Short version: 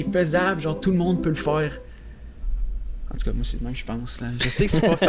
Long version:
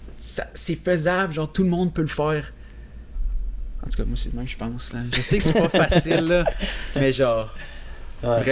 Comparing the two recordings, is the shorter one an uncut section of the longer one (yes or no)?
yes